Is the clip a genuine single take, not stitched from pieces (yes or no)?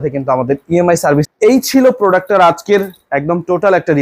yes